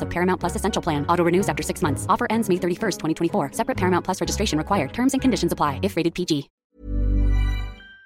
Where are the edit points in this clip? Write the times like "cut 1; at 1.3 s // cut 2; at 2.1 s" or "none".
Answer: cut 1; at 6.6 s